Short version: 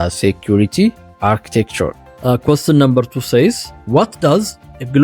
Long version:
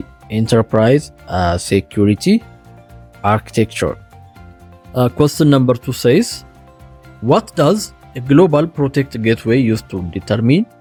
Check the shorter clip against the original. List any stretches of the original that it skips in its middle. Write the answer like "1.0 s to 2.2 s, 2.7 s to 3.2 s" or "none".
2.6 s to 3.1 s, 4.1 s to 4.8 s, 6.4 s to 7.1 s